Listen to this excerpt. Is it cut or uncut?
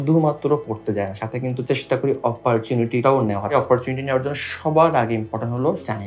uncut